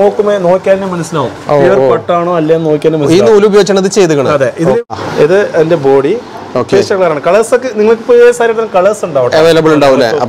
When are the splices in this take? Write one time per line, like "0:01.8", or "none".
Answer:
0:04.8